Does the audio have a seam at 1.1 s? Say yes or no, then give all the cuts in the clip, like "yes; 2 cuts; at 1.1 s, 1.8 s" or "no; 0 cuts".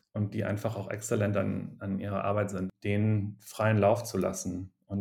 no; 1 cut; at 2.7 s